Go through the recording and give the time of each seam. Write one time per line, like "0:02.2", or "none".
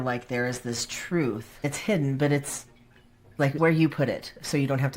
0:01.6
0:03.5